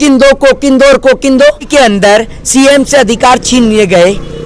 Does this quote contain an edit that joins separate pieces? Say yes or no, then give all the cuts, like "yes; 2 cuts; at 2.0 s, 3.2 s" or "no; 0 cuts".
yes; 1 cut; at 1.7 s